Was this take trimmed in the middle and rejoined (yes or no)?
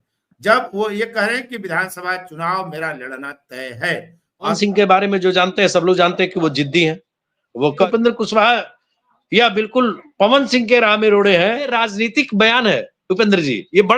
yes